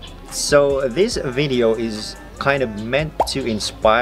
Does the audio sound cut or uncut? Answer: uncut